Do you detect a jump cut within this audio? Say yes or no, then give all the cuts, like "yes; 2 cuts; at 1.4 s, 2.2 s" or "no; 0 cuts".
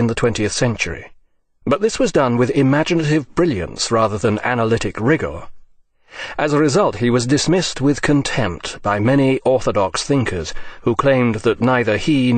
no; 0 cuts